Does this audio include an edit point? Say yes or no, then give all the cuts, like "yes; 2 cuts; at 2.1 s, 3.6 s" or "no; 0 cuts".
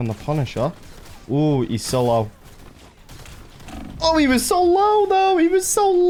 no; 0 cuts